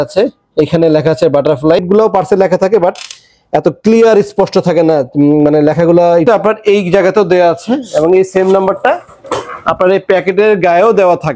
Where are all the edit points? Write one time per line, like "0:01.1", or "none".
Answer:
0:01.8
0:06.2